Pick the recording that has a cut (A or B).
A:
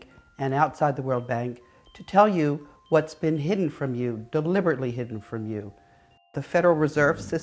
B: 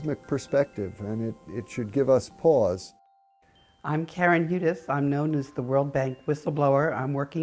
A